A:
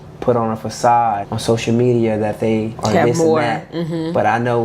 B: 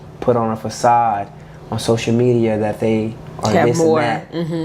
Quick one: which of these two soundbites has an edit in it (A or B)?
A